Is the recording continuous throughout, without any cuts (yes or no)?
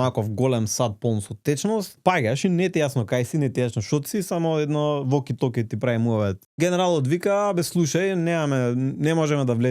no